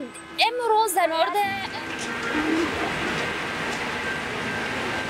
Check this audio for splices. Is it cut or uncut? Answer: uncut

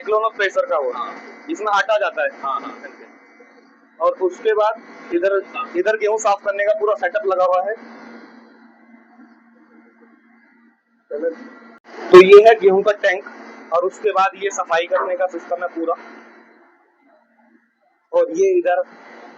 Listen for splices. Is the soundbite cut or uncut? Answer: uncut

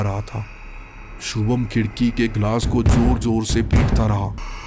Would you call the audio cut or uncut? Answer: uncut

